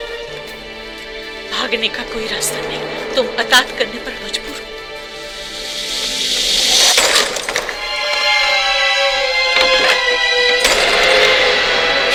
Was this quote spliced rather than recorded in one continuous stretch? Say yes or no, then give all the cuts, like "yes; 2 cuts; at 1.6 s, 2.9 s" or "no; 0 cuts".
no; 0 cuts